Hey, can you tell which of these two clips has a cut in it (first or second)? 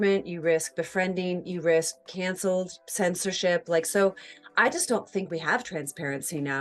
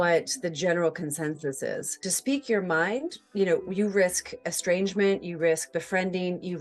second